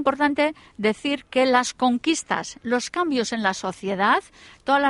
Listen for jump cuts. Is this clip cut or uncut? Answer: uncut